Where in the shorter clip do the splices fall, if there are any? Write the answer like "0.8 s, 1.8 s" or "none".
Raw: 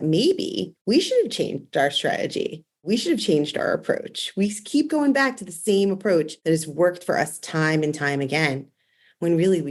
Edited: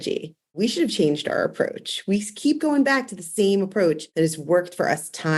none